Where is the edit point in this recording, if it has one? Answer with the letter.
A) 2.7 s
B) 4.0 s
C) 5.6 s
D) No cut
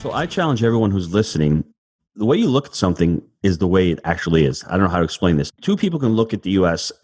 C